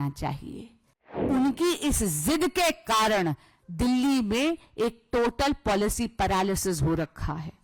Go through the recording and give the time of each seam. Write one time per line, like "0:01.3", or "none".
0:01.2